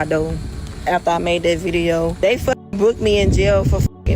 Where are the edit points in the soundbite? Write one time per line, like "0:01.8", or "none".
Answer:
0:02.1